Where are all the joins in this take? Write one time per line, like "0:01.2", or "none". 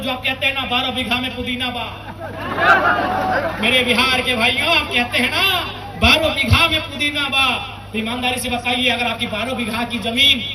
none